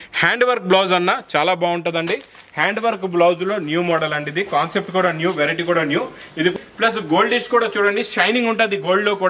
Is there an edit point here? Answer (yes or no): yes